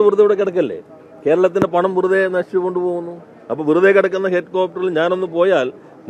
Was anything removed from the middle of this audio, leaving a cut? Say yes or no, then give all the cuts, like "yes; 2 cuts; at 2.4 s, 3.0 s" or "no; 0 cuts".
no; 0 cuts